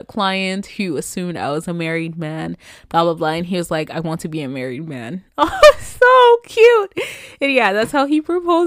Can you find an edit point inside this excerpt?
no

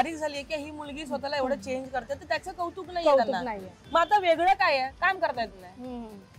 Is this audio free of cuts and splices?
yes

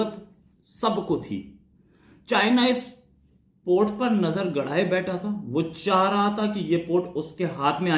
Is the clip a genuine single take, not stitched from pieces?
yes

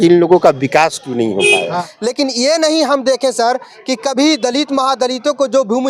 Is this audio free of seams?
no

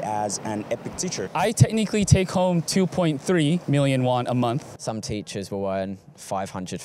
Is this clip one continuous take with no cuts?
no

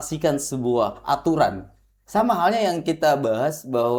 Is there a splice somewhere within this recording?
no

